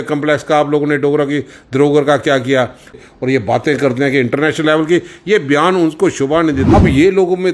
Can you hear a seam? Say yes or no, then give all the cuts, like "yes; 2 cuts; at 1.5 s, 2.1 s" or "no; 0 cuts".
yes; 2 cuts; at 3.0 s, 6.6 s